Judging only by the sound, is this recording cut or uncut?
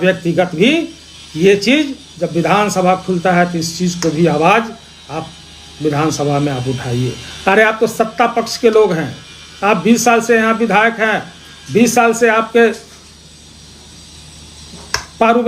uncut